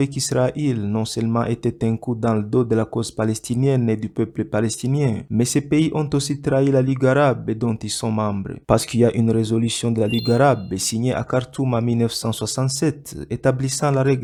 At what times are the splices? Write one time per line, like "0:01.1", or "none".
none